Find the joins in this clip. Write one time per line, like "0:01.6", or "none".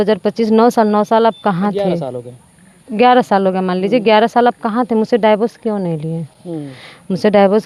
none

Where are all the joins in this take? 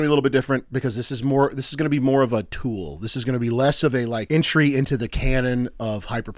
0:04.2

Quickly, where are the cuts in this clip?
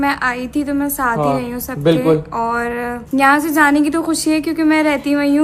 0:03.0

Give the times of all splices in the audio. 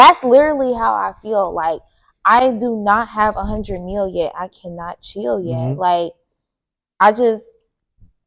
none

